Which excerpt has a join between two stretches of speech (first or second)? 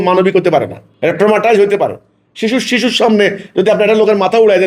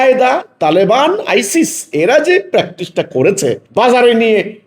second